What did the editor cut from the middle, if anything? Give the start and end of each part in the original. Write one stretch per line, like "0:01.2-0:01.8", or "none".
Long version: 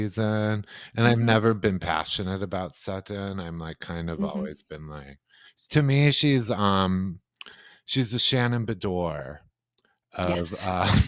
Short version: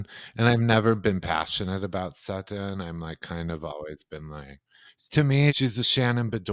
0:06.2-0:07.9